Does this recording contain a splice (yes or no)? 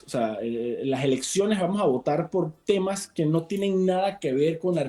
no